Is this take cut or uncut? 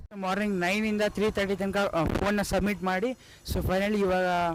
uncut